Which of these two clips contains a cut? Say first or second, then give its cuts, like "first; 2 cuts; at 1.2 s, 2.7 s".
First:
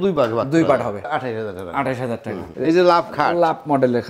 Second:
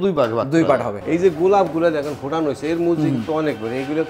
second; 1 cut; at 1.0 s